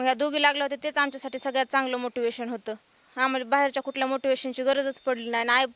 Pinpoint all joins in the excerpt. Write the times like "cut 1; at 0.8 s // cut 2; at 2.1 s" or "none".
none